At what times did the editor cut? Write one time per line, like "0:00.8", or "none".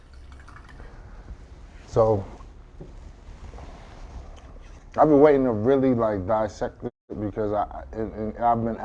0:04.8